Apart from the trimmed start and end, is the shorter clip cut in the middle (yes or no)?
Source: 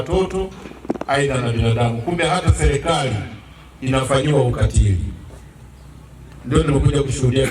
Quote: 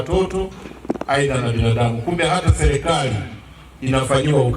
no